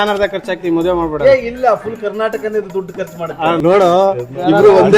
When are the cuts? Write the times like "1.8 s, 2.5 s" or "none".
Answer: 3.6 s